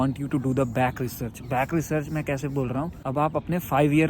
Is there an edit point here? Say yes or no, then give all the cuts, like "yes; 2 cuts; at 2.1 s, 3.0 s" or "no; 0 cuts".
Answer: yes; 1 cut; at 3.0 s